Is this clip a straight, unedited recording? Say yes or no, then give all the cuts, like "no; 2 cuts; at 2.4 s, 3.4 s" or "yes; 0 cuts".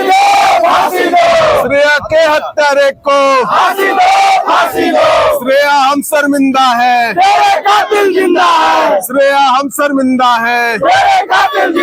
yes; 0 cuts